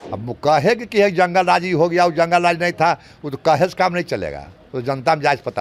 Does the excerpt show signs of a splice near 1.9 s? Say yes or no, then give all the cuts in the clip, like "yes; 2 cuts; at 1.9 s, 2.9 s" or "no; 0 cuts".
no; 0 cuts